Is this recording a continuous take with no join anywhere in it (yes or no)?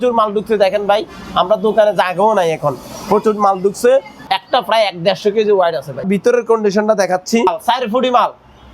no